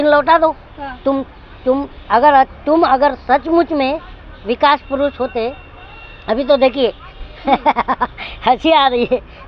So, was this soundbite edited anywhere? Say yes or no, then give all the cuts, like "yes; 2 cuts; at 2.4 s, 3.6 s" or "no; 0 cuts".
no; 0 cuts